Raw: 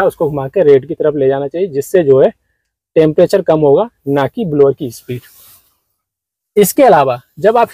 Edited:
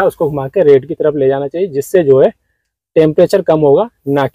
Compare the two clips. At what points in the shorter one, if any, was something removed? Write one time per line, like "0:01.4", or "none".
none